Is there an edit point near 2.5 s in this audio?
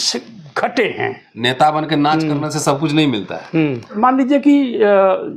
no; 2 cuts; at 1.2 s, 3.9 s

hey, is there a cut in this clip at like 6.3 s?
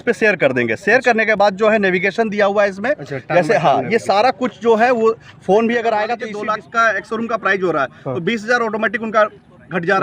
yes; 1 cut; at 6.3 s

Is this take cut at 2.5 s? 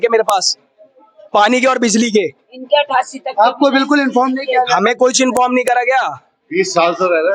no; 0 cuts

